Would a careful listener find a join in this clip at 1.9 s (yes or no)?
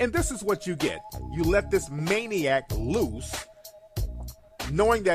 yes